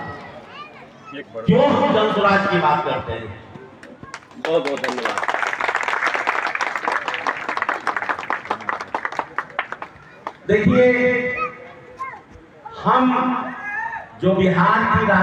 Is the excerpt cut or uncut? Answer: uncut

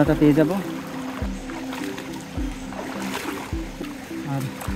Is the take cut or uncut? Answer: uncut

